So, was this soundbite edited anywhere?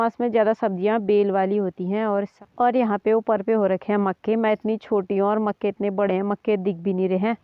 yes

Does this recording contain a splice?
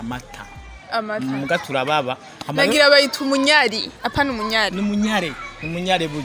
no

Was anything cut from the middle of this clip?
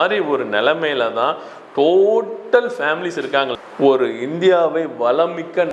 yes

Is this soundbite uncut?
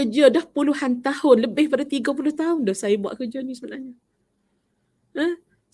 yes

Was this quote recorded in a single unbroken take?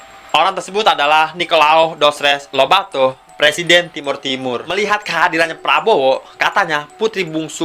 no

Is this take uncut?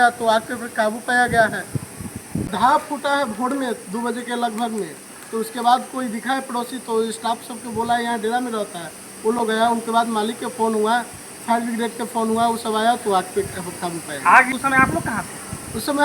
no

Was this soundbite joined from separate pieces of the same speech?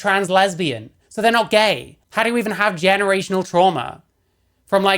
yes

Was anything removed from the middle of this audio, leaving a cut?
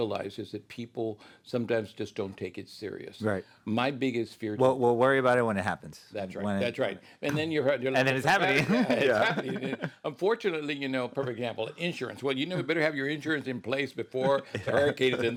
no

